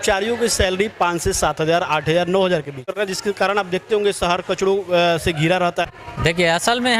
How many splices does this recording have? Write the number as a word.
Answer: two